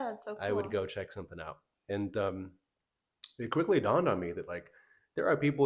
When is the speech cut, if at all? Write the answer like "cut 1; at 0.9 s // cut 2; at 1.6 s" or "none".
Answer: none